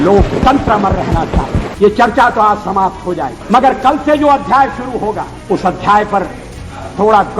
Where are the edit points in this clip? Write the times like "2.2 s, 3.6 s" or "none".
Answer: 1.7 s, 3.4 s, 5.3 s